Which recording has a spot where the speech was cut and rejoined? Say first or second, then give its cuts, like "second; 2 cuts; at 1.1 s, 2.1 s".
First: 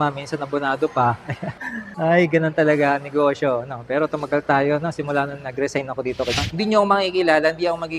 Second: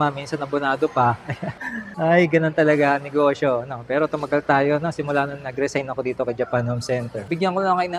first; 1 cut; at 6.4 s